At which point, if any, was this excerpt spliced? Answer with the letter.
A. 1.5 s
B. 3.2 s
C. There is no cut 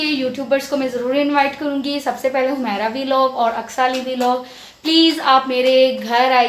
C